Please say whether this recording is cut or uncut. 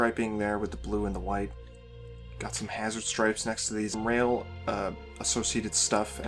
uncut